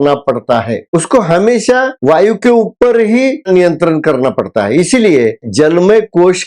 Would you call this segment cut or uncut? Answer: cut